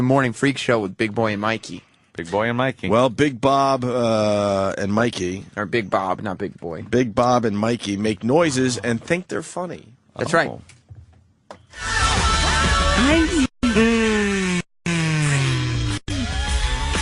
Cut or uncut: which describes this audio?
uncut